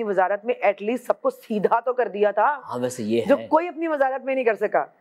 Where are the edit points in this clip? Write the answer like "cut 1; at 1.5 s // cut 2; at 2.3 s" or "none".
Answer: none